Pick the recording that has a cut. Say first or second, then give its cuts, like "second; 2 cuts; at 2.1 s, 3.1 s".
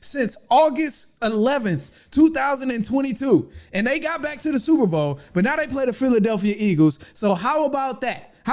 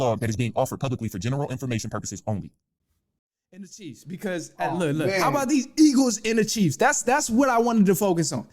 second; 1 cut; at 3.1 s